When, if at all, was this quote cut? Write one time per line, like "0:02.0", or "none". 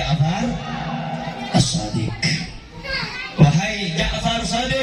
none